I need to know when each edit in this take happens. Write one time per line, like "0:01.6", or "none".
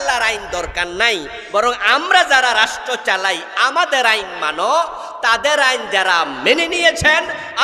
none